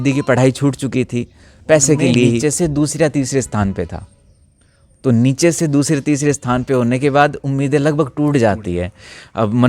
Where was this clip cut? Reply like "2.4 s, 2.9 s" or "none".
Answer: 2.4 s

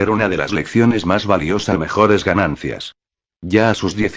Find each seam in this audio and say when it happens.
none

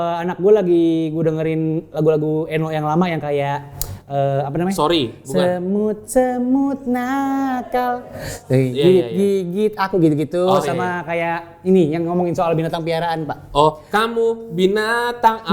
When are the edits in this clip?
none

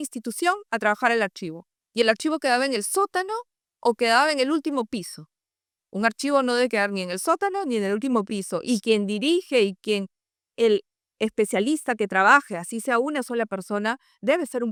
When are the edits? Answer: none

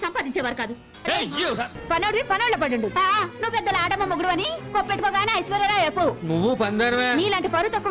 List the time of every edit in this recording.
1.7 s

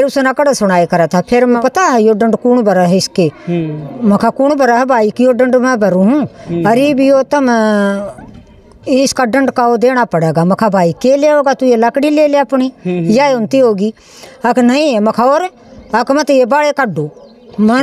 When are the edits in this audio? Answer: 1.6 s

